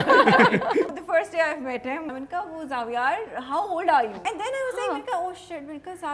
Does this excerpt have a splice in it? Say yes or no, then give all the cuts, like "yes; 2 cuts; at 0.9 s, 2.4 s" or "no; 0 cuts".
yes; 3 cuts; at 1.0 s, 2.2 s, 4.3 s